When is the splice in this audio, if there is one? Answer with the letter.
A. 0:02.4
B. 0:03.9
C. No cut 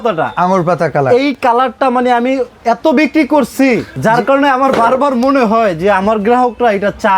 B